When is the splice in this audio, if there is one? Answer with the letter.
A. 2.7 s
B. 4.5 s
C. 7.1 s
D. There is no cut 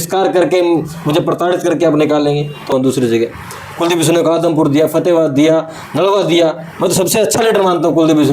A